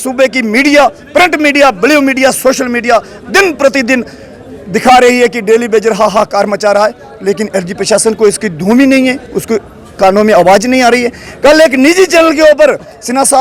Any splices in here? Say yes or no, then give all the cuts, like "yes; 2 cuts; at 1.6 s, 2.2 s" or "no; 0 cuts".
no; 0 cuts